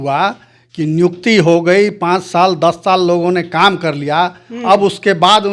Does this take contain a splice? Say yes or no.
no